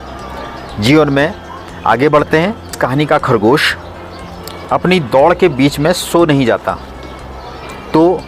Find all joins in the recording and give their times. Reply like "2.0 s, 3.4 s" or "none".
2.8 s